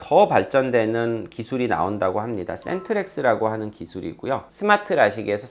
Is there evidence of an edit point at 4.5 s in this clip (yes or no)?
yes